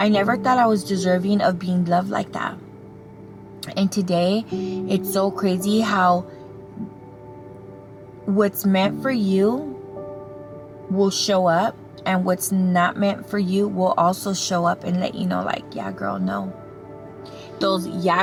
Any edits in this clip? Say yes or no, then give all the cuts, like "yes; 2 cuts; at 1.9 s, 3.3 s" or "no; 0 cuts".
no; 0 cuts